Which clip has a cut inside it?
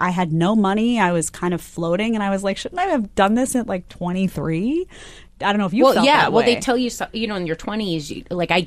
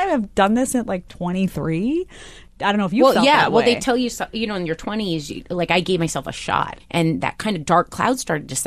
second; 1 cut; at 6.8 s

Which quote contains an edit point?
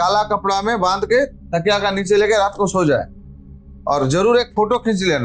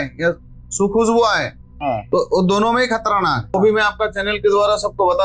second; 1 cut; at 3.5 s

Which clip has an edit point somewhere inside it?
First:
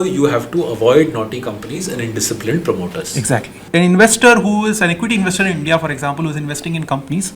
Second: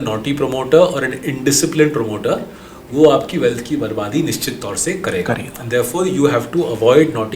first; 1 cut; at 3.6 s

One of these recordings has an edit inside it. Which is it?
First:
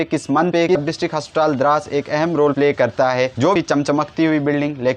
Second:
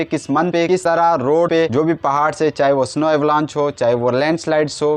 first; 2 cuts; at 0.8 s, 3.6 s

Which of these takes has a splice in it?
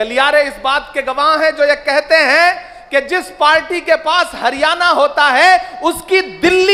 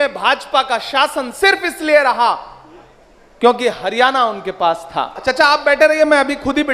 second; 1 cut; at 5.2 s

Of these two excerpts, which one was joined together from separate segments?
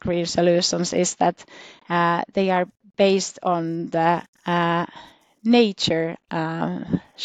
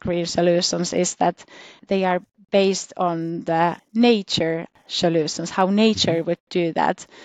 second; 3 cuts; at 1.8 s, 3.8 s, 4.8 s

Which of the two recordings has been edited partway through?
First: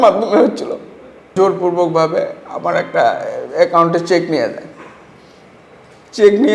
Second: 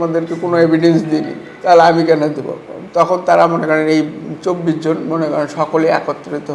first; 1 cut; at 1.3 s

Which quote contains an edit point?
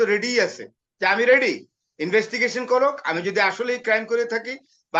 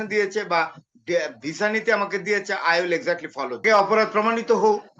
second; 1 cut; at 3.6 s

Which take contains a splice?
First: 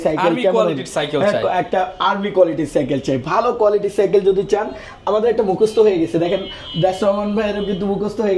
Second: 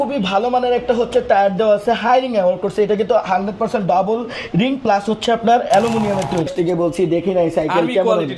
second; 1 cut; at 6.5 s

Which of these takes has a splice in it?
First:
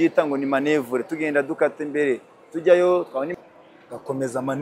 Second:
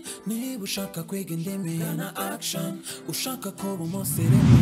first; 1 cut; at 3.3 s

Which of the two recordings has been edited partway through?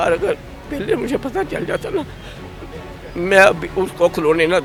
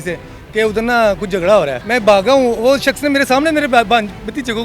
second; 1 cut; at 1.8 s

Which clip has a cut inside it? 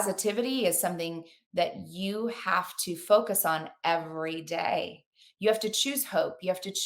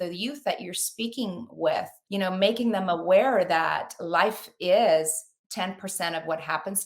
second; 1 cut; at 2.0 s

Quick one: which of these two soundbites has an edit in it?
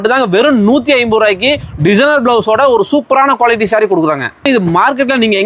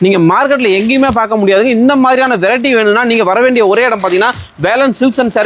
first; 1 cut; at 4.5 s

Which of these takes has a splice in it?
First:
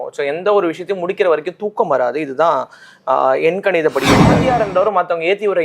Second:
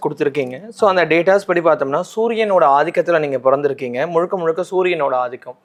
first; 1 cut; at 4.4 s

